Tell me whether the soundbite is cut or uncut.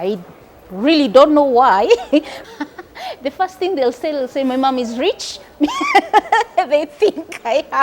cut